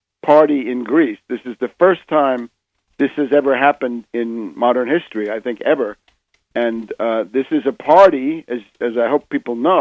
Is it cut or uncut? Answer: uncut